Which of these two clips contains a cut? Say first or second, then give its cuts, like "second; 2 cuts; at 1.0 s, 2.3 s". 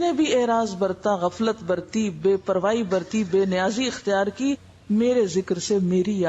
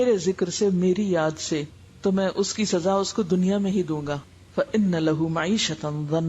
second; 1 cut; at 4.3 s